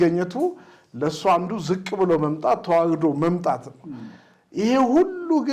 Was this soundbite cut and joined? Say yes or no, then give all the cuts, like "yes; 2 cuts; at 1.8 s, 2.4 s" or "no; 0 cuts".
no; 0 cuts